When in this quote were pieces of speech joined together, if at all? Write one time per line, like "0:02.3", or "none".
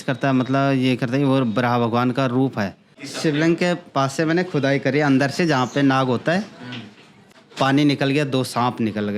0:03.3
0:07.3